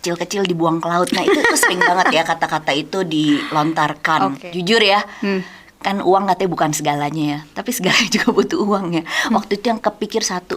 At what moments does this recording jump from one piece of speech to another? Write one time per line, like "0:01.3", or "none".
0:04.4